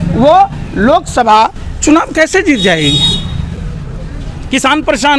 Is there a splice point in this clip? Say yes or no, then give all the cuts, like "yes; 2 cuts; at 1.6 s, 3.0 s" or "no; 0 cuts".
no; 0 cuts